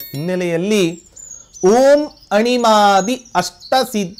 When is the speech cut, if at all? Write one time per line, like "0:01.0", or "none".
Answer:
none